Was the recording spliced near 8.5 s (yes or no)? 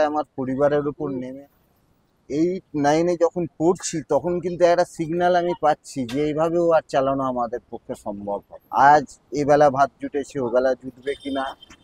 yes